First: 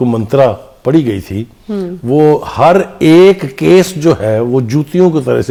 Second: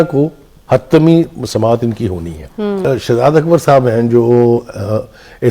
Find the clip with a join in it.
second; 1 cut; at 2.8 s

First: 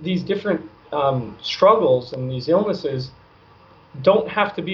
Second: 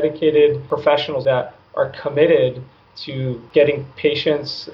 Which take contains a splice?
second; 2 cuts; at 1.2 s, 3.4 s

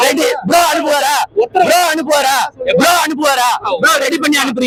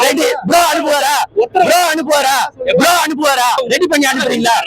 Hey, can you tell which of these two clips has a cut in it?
second; 1 cut; at 3.6 s

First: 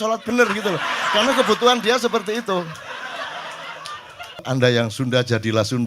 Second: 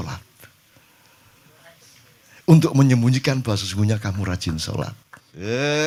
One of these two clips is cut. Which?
first; 1 cut; at 4.4 s

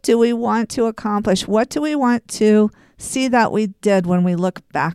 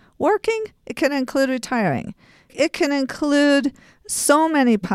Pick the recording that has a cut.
second; 1 cut; at 2.5 s

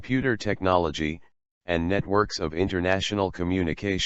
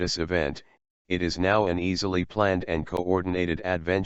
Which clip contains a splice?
first; 1 cut; at 2.7 s

